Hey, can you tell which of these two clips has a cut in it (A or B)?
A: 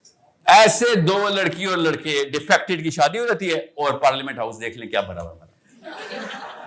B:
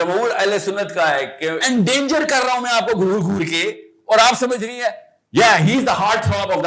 B